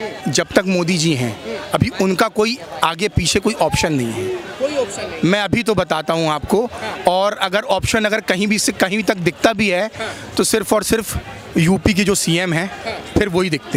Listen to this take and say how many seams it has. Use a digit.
0